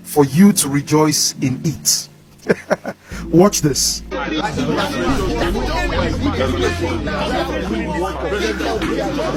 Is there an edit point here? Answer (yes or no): no